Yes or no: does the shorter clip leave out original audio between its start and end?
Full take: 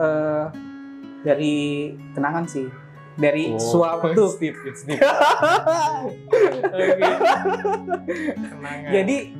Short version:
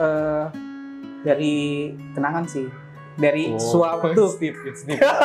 no